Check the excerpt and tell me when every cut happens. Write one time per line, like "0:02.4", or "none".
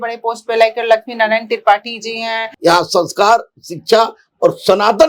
0:02.5